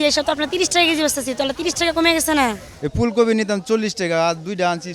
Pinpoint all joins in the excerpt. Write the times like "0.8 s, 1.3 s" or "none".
2.6 s